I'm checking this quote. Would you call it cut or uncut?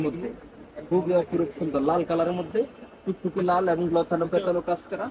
uncut